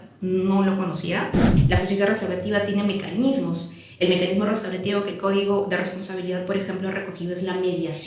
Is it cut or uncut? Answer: cut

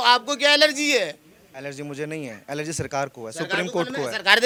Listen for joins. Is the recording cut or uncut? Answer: uncut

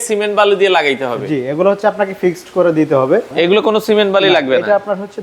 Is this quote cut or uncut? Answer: cut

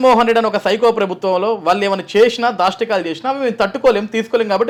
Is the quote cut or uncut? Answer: uncut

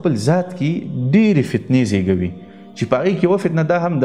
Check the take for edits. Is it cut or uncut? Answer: uncut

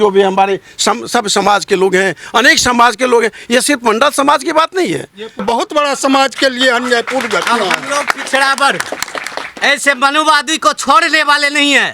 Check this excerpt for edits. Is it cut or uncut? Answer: cut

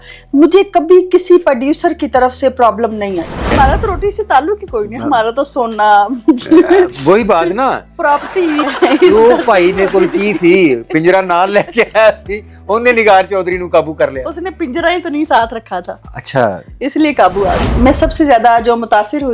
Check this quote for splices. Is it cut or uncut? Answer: cut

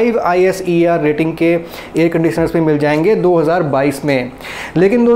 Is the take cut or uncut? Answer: uncut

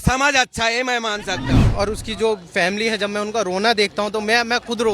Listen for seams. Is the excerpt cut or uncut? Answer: cut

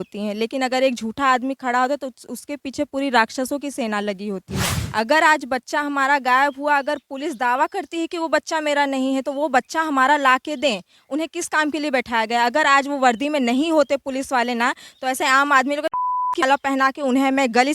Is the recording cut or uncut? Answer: cut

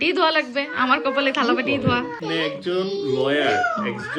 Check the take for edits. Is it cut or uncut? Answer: cut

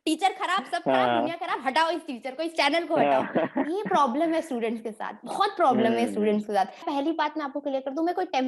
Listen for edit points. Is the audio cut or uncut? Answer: cut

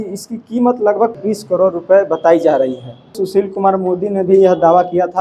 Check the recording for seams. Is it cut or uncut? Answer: cut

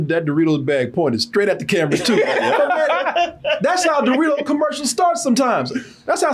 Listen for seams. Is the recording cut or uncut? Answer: uncut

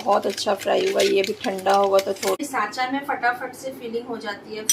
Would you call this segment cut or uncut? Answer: cut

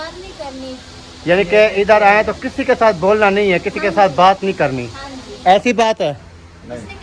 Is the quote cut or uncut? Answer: uncut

